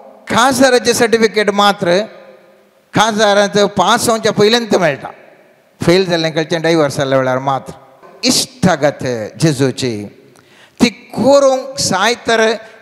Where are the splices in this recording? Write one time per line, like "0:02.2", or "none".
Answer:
0:08.1